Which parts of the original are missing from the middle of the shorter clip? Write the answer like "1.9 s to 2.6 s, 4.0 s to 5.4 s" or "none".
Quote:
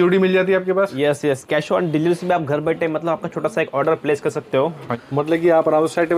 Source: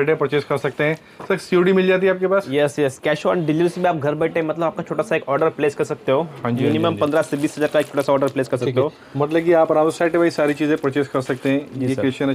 6.5 s to 9.0 s